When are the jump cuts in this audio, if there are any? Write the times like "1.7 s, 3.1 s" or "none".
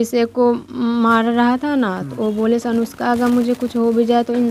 none